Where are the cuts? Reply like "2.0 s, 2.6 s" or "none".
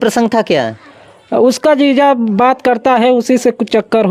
none